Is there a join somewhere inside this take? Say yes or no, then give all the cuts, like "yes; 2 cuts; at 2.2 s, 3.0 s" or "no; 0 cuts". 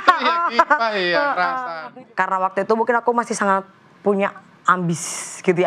yes; 1 cut; at 1.7 s